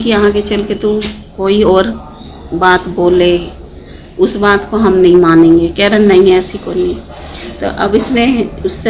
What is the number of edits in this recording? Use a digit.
0